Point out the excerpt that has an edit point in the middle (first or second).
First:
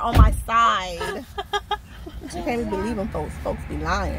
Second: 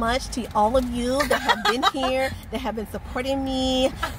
first